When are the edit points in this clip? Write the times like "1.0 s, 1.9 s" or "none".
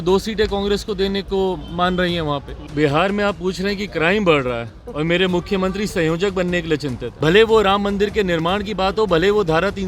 2.6 s, 7.1 s